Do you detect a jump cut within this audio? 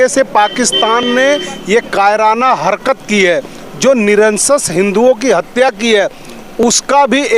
no; 0 cuts

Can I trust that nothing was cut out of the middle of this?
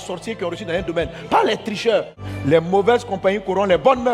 no; 1 cut; at 2.1 s

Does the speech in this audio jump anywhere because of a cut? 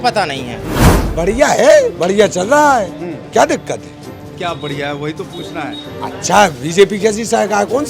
yes; 1 cut; at 1.0 s

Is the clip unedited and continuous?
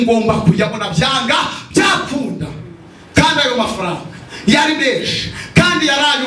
yes; 0 cuts

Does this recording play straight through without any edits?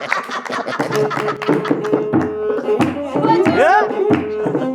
yes; 0 cuts

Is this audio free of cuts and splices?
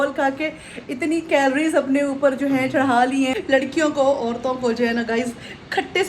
no; 1 cut; at 3.4 s

